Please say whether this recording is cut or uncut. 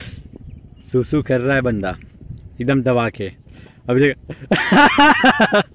uncut